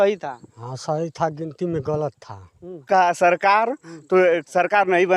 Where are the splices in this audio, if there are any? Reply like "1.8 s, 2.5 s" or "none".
2.8 s